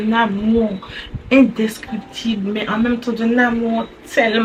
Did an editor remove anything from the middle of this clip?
no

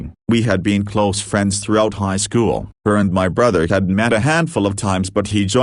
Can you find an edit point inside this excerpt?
no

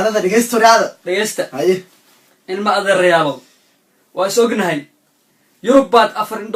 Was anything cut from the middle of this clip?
no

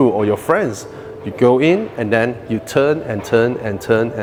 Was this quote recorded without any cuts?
yes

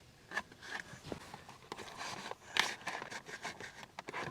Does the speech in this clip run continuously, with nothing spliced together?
no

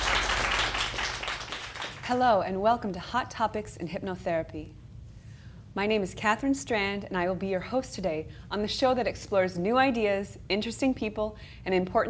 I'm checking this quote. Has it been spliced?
no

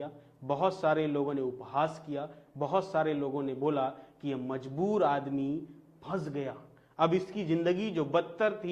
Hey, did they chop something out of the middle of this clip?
no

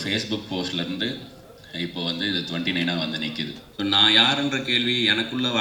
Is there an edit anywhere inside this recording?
yes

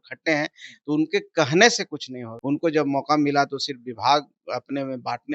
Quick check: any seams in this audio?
yes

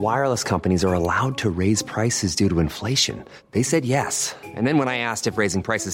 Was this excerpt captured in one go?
yes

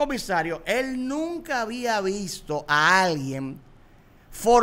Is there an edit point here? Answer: no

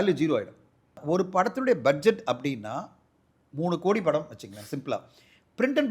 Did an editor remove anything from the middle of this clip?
yes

